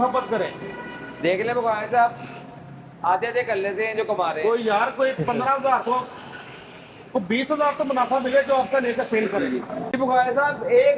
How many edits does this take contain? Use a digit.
1